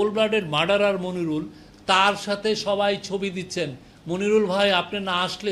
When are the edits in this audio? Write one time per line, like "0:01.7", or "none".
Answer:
none